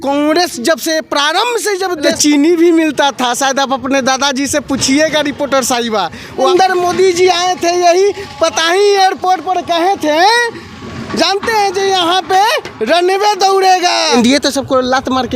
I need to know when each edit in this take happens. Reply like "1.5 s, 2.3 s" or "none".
2.1 s, 6.5 s, 14.1 s